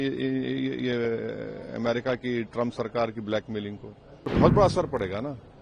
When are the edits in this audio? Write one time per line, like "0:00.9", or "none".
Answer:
0:04.3